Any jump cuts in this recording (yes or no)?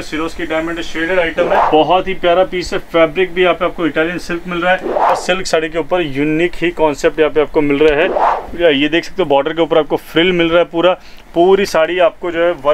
yes